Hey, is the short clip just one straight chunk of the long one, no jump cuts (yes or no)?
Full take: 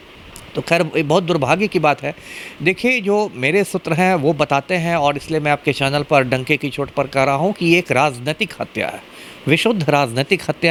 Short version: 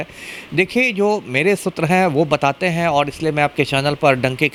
yes